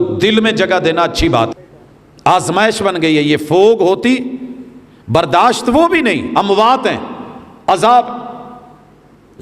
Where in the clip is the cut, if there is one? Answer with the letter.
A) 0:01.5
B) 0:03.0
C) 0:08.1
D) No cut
A